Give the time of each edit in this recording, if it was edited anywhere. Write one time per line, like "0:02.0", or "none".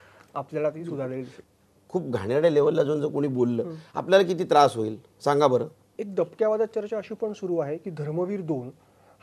0:01.3
0:06.0